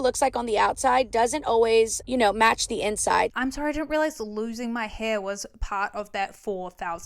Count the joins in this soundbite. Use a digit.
2